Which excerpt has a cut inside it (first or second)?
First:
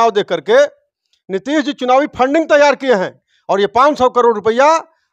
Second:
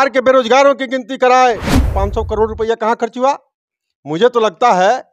second